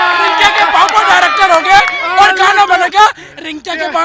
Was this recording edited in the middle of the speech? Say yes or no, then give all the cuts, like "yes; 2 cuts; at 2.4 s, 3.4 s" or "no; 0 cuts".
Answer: no; 0 cuts